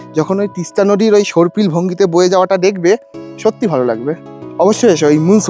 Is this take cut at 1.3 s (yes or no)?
no